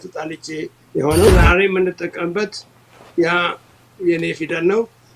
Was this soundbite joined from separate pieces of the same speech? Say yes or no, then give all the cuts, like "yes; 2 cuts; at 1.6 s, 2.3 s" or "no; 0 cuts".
yes; 1 cut; at 1.3 s